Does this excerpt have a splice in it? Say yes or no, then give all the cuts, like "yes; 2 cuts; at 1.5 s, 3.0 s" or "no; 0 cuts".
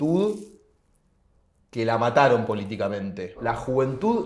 yes; 1 cut; at 3.4 s